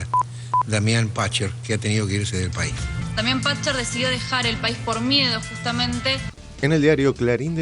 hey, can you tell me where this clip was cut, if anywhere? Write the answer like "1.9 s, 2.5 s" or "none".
6.3 s